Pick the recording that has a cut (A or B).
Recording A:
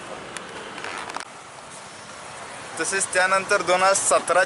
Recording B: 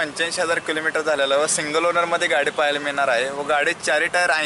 A